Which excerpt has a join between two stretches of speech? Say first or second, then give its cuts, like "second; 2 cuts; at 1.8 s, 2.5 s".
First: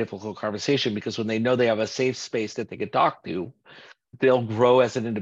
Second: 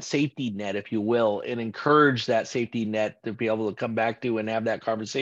first; 1 cut; at 4.1 s